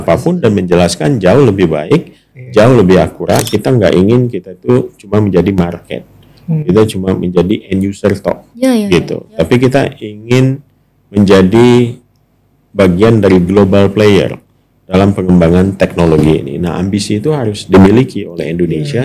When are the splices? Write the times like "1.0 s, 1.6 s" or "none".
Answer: 3.5 s